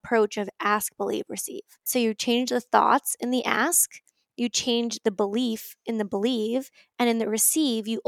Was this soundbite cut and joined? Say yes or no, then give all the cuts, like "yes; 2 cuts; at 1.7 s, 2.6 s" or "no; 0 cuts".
yes; 1 cut; at 1.9 s